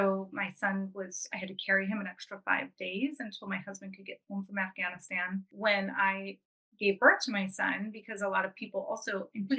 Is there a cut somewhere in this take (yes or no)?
yes